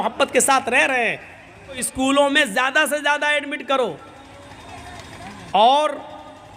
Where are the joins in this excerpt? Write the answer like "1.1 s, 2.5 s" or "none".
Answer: 1.9 s